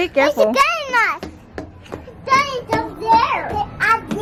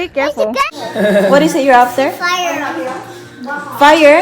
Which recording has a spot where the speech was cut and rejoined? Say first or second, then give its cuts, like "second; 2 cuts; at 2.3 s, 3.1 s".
second; 1 cut; at 0.9 s